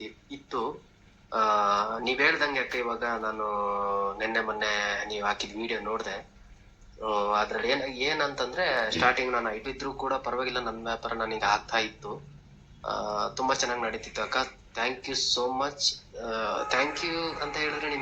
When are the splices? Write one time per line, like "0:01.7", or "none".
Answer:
0:09.6